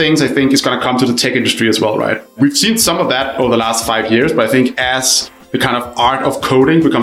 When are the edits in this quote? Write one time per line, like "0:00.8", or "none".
0:02.4